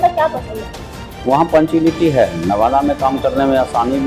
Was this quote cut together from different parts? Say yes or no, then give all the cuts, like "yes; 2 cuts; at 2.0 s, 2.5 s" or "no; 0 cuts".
yes; 1 cut; at 1.0 s